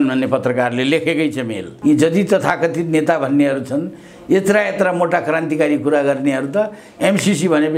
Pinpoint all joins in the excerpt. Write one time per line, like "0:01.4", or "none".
0:01.6

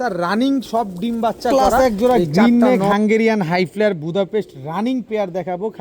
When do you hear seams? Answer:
0:01.5

